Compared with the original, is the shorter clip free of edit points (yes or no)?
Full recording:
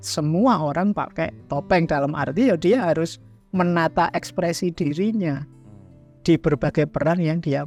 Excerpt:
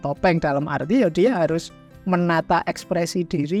yes